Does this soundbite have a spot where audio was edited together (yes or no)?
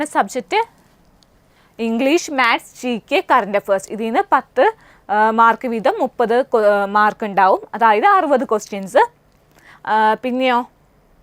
no